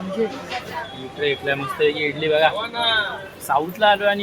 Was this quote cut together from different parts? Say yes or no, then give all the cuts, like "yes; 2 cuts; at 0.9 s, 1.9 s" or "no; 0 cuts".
no; 0 cuts